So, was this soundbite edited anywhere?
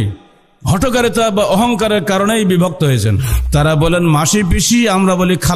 yes; 1 cut; at 3.3 s

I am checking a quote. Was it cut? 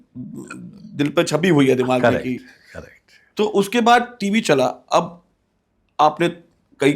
no; 0 cuts

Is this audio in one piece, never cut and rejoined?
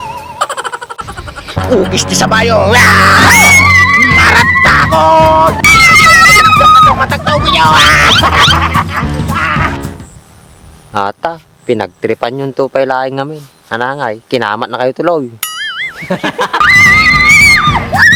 yes; 0 cuts

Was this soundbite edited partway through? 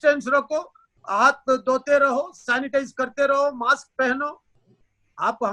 no; 0 cuts

